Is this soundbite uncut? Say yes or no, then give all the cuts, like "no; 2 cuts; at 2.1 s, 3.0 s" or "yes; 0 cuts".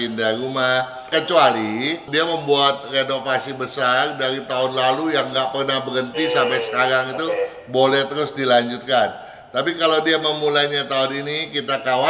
no; 2 cuts; at 1.1 s, 2.0 s